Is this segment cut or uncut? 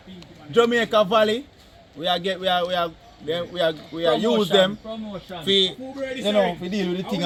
uncut